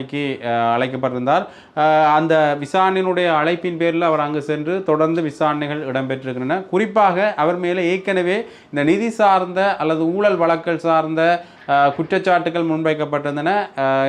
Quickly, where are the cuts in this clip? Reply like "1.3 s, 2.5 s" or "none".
none

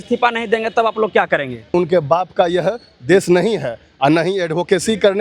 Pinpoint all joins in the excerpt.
1.7 s

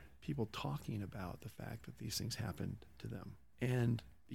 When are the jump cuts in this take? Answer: none

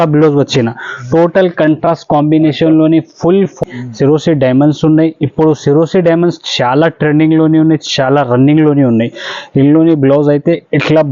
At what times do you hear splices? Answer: 3.6 s

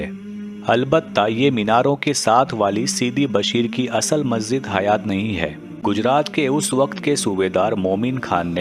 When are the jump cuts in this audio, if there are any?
5.7 s

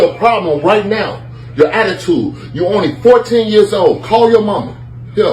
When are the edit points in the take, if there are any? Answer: none

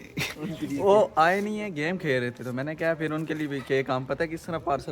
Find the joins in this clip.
none

